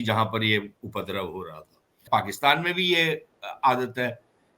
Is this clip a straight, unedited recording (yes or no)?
no